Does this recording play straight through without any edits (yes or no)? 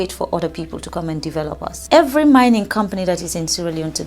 no